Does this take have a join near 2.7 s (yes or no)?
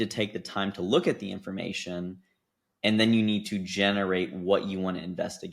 no